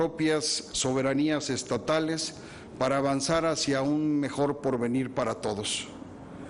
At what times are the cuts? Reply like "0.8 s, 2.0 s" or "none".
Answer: 3.1 s

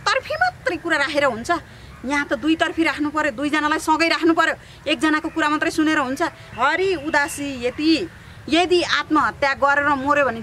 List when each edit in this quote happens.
6.5 s

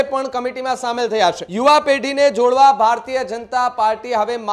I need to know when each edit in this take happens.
1.5 s

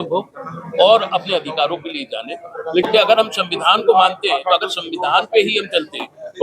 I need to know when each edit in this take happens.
2.8 s

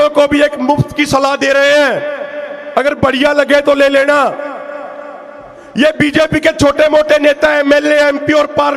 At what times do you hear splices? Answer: none

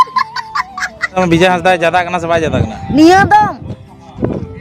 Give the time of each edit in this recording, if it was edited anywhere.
1.2 s

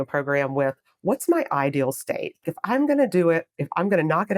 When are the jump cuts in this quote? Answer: 2.4 s

